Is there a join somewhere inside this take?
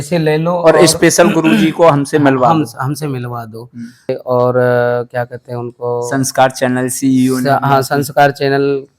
yes; 1 cut; at 4.2 s

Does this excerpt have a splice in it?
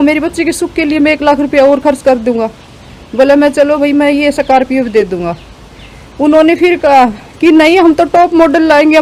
no; 0 cuts

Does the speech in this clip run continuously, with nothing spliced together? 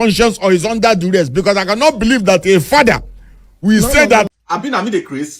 no; 1 cut; at 4.3 s

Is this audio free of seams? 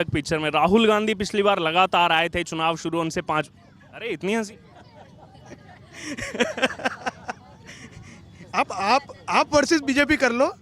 yes; 0 cuts

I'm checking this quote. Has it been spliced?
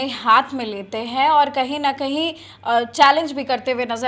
no; 0 cuts

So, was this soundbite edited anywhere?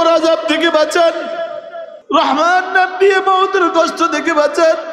no; 0 cuts

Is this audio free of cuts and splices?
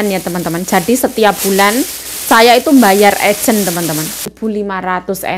no; 1 cut; at 4.3 s

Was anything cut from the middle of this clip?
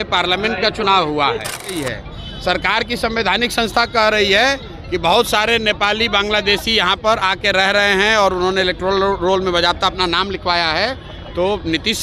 yes; 1 cut; at 1.8 s

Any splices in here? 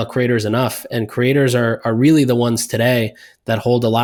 no; 0 cuts

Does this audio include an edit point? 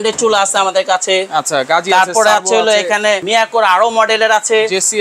yes; 1 cut; at 3.2 s

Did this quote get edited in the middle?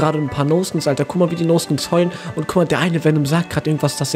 no; 0 cuts

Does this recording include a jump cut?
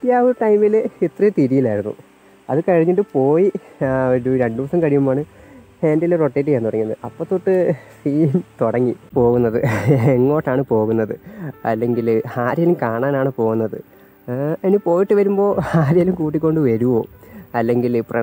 yes; 1 cut; at 9.1 s

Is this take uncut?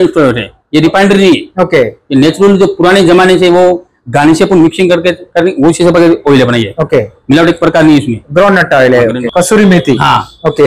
no; 1 cut; at 9.2 s

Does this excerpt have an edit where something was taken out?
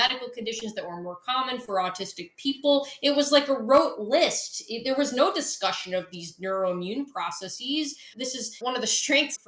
yes; 1 cut; at 8.1 s

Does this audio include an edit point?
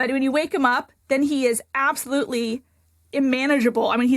yes; 1 cut; at 3.0 s

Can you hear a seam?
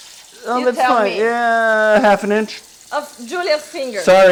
no; 0 cuts

